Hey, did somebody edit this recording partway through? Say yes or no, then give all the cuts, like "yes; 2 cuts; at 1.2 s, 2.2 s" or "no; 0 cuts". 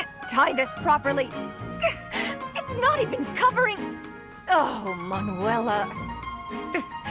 no; 0 cuts